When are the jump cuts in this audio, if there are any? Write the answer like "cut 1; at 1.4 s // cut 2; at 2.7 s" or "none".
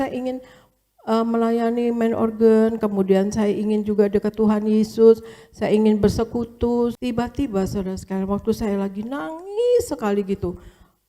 cut 1; at 7.0 s